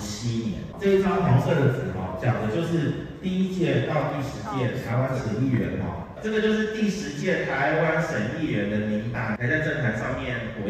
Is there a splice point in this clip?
no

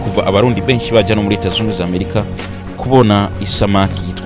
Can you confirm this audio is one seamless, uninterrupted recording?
yes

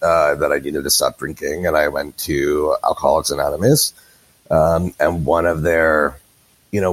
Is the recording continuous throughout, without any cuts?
yes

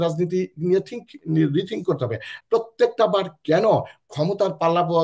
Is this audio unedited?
no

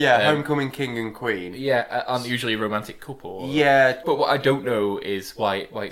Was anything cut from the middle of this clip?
yes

